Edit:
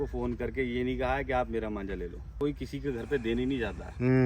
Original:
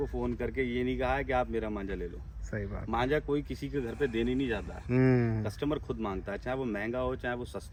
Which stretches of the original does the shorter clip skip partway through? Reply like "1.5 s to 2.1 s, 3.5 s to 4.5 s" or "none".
2.4 s to 3.3 s